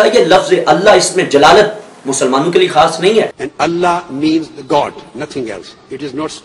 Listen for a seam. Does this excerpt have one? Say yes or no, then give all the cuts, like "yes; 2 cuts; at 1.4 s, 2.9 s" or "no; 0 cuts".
yes; 1 cut; at 3.3 s